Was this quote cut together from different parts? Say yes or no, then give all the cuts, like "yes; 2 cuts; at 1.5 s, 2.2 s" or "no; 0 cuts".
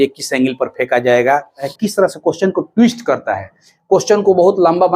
yes; 1 cut; at 1.7 s